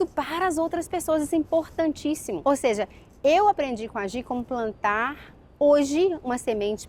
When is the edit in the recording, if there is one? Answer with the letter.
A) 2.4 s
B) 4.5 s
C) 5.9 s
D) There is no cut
A